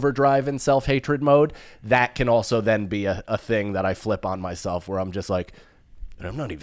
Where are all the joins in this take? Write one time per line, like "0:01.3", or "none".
none